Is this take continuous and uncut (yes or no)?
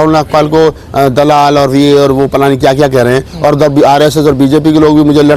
yes